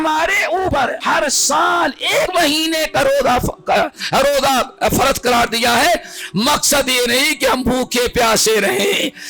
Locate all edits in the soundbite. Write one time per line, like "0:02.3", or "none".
0:00.7
0:02.3